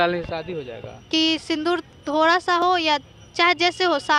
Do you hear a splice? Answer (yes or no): no